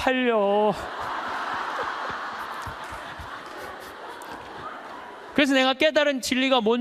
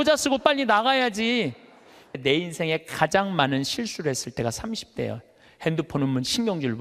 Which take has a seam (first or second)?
second